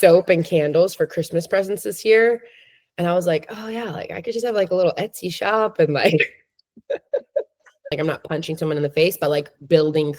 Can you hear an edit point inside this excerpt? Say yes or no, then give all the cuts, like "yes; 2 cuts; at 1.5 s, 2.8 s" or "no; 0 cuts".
yes; 1 cut; at 7.9 s